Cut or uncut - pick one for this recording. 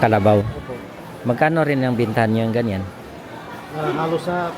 uncut